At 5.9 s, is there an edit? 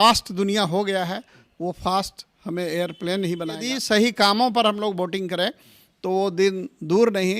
no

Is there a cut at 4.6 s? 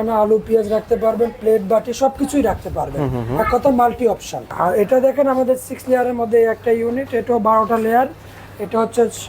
yes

